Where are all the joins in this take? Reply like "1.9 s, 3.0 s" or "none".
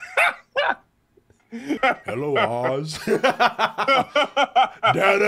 1.8 s